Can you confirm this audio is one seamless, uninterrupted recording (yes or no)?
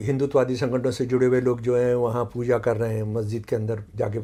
yes